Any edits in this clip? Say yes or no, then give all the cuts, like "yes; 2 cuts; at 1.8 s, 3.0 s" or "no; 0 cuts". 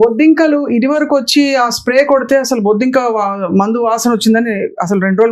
no; 0 cuts